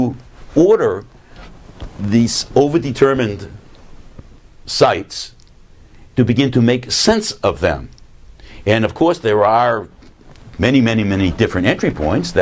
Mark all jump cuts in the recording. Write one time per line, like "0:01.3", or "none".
0:06.9